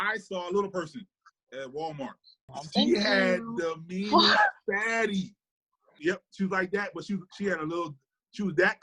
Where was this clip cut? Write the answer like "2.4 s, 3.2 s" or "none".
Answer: 2.5 s, 5.9 s